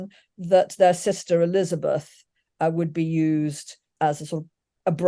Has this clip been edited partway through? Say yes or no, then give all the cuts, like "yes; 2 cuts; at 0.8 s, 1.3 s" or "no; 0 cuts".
no; 0 cuts